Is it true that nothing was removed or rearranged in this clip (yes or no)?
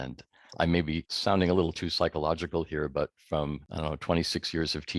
no